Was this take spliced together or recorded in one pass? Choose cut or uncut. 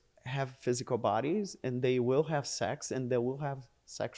uncut